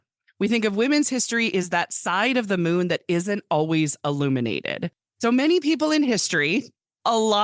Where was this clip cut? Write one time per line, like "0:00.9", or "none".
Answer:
0:04.8